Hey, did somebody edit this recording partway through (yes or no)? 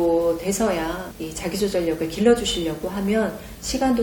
no